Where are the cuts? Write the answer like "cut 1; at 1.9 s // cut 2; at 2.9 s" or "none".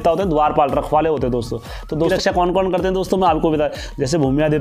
cut 1; at 2.1 s